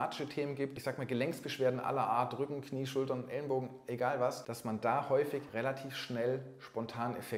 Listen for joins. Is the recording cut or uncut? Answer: cut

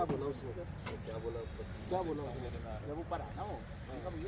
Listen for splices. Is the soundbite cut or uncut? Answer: uncut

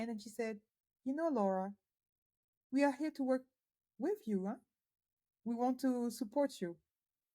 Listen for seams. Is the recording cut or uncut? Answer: uncut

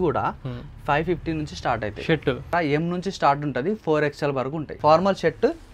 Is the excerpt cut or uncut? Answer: cut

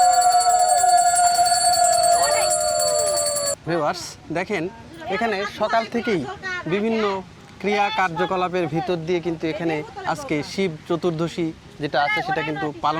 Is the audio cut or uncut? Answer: cut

